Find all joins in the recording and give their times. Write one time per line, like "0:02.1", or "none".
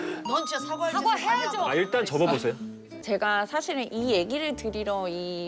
0:03.0